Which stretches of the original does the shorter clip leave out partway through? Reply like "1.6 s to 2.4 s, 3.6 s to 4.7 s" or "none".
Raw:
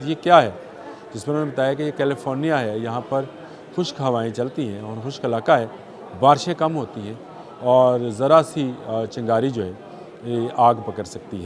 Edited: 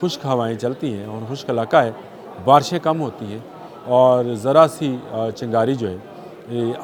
none